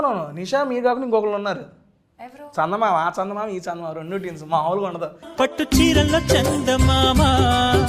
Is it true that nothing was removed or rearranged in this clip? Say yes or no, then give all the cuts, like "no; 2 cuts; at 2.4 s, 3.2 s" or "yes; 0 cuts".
yes; 0 cuts